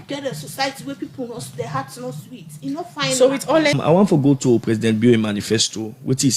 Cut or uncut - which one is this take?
cut